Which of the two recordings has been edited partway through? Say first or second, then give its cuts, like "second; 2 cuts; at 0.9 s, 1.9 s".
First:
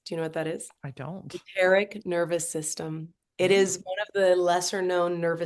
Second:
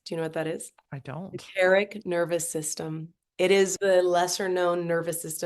second; 1 cut; at 3.8 s